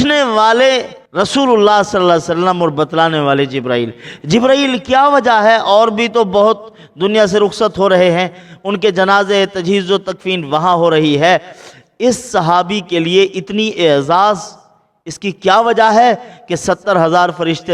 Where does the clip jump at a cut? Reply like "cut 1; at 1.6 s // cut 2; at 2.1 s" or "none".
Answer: cut 1; at 1.0 s